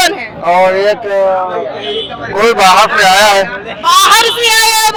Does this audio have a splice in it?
no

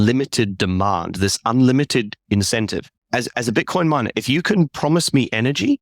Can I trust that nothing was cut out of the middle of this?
yes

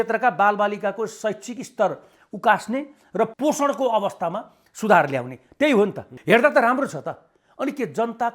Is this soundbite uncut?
no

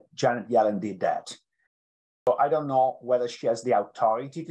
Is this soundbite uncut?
no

